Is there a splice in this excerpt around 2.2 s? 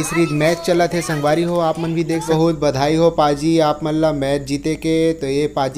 yes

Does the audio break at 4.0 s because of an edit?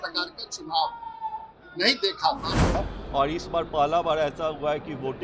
no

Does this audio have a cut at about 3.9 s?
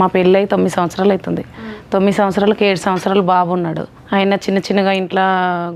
yes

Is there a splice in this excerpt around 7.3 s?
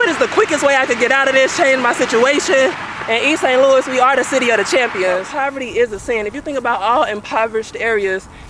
no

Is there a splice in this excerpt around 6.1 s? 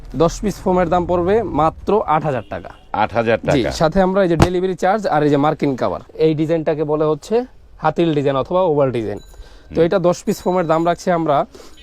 yes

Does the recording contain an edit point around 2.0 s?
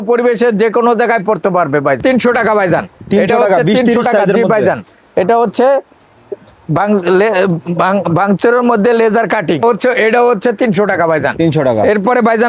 no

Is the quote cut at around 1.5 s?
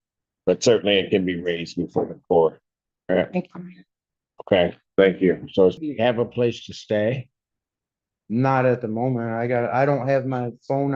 no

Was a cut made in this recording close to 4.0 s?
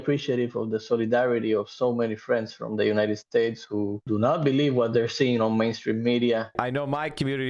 yes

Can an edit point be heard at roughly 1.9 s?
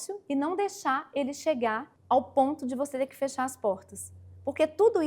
yes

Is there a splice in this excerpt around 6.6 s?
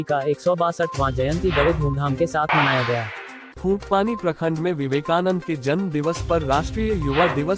no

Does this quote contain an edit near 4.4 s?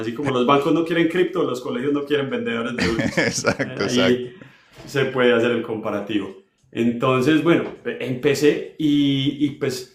no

